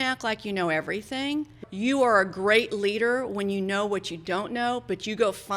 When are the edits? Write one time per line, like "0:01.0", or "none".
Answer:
0:01.6